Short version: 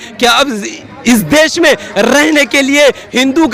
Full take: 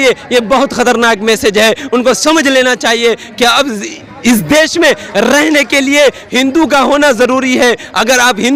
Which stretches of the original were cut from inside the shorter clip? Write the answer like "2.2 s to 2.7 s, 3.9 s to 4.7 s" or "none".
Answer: none